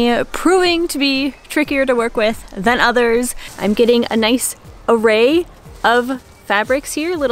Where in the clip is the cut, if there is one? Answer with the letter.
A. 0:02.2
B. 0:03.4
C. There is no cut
B